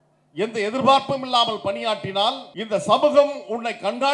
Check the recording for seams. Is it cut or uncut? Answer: cut